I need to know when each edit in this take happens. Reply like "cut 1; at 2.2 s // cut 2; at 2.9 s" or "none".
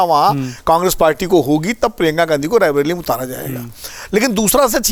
none